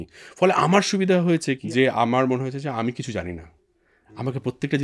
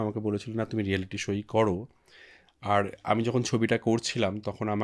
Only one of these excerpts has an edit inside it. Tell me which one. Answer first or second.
first